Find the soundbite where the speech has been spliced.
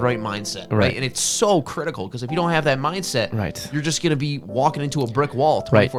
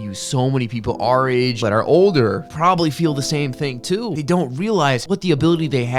second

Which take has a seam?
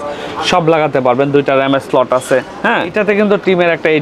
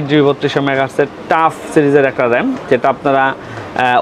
first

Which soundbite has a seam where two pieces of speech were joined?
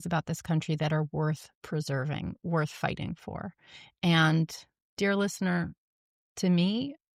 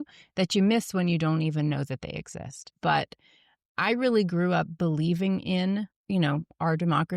second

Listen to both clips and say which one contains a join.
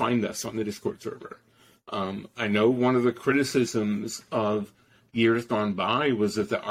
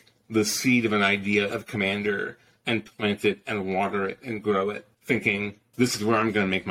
second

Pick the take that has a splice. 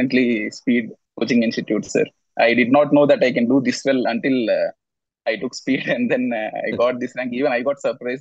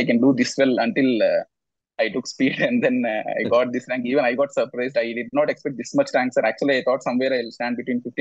first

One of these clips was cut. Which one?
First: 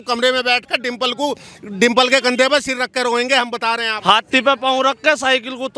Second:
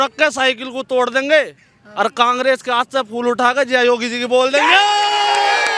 first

